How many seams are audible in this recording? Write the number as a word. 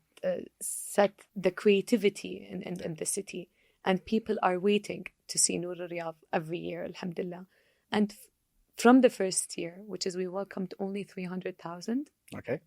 one